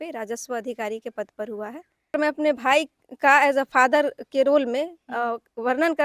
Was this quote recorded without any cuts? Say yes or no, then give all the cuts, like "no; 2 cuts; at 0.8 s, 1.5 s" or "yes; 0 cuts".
no; 1 cut; at 2.1 s